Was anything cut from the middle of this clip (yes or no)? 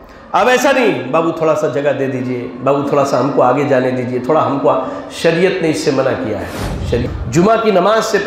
yes